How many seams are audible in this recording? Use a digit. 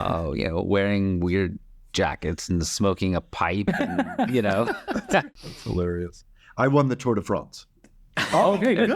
1